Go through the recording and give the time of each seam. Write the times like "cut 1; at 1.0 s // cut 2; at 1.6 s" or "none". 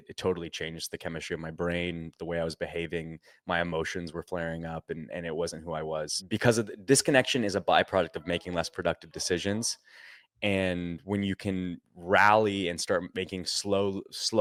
none